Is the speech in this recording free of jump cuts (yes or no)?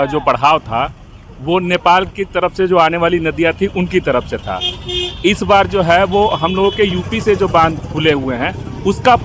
yes